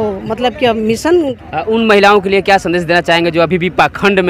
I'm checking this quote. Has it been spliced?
yes; 1 cut; at 1.4 s

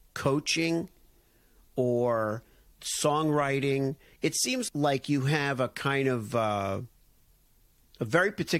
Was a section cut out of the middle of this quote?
yes; 1 cut; at 4.7 s

